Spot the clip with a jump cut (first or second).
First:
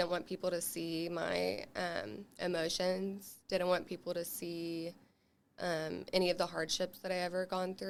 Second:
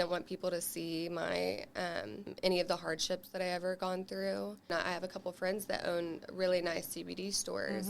second